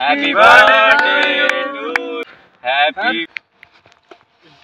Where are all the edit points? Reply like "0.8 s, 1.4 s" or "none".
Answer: 2.3 s, 3.2 s